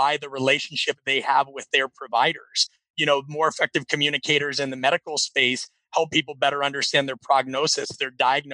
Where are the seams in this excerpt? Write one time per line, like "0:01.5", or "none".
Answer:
none